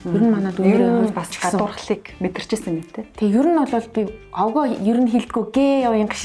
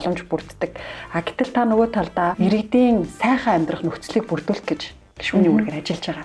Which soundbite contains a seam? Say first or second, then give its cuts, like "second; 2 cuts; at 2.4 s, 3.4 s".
second; 1 cut; at 2.3 s